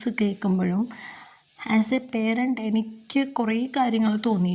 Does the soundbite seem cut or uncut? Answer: uncut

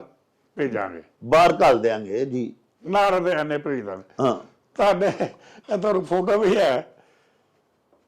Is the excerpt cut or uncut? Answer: uncut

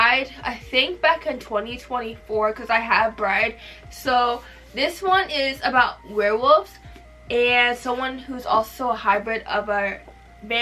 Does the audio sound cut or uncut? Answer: uncut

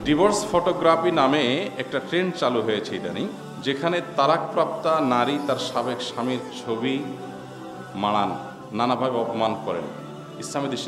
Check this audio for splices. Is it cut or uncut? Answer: uncut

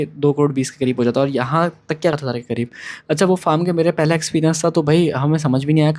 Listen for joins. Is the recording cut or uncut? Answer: cut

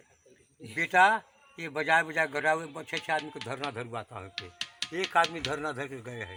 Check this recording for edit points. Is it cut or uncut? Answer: uncut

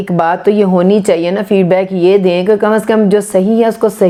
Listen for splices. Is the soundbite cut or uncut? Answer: uncut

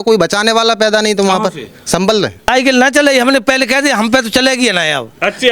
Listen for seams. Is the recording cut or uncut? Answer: cut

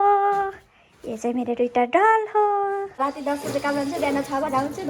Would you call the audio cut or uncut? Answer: cut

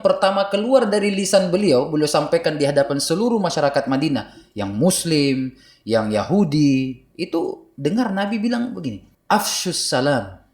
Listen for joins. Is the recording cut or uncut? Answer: cut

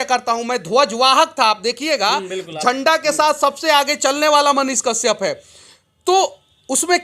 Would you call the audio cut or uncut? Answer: uncut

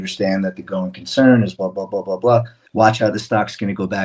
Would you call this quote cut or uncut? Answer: cut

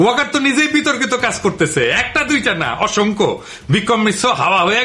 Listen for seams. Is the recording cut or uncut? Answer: uncut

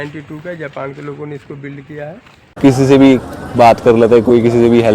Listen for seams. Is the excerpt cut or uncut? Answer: cut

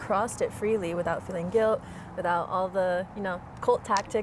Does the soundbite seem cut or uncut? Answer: uncut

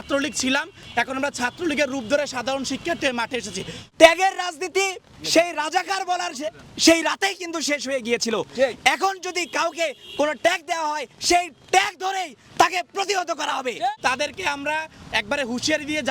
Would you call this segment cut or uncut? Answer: cut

